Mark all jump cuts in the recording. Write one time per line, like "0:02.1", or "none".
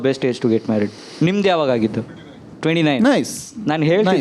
0:01.0